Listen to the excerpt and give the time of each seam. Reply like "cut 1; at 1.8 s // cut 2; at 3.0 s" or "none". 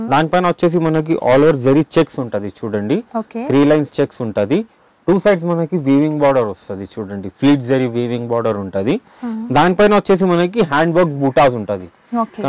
none